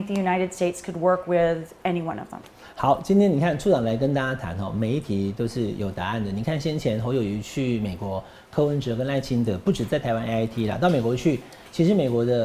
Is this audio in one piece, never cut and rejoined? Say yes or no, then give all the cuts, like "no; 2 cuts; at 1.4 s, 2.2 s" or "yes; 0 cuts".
yes; 0 cuts